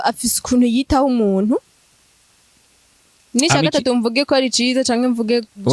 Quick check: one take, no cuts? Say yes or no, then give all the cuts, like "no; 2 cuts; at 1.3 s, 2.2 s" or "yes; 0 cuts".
yes; 0 cuts